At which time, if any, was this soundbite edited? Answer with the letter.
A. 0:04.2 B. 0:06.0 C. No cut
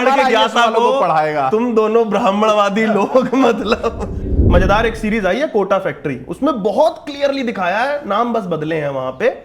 A